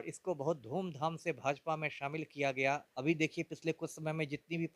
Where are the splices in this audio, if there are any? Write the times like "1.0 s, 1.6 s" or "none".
2.9 s